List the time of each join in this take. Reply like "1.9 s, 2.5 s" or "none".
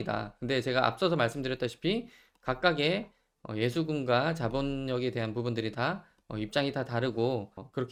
none